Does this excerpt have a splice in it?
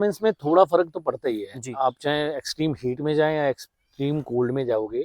no; 0 cuts

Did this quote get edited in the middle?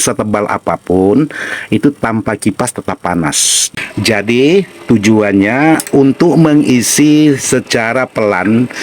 yes; 1 cut; at 3.5 s

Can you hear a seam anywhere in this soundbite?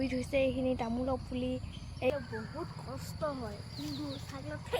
yes; 1 cut; at 2.1 s

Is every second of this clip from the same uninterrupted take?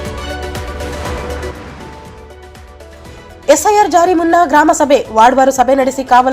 no; 1 cut; at 2.8 s

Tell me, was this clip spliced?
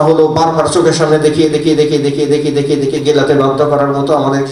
no; 0 cuts

